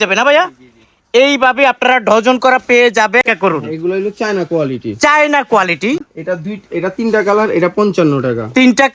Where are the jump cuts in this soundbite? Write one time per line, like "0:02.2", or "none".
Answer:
0:03.2
0:06.0